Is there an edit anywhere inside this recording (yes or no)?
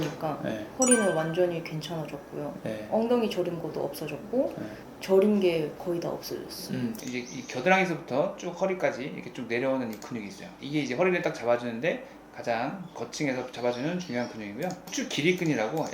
yes